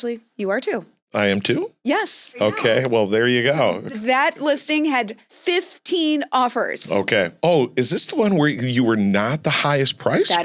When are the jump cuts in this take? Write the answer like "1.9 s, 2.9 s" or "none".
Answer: none

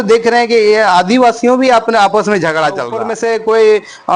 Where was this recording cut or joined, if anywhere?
3.0 s

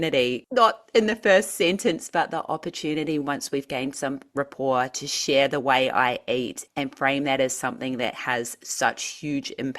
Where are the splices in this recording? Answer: 6.6 s

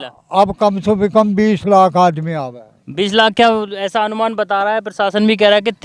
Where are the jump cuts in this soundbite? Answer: none

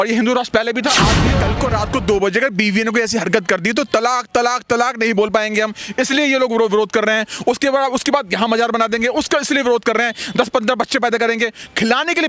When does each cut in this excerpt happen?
1.2 s

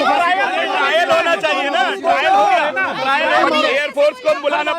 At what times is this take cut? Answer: 3.4 s

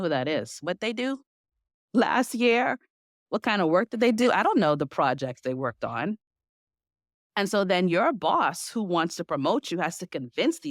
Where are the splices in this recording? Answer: none

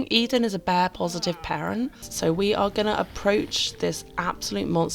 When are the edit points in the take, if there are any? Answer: 2.0 s

